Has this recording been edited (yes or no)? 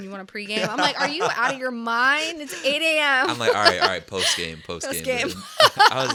no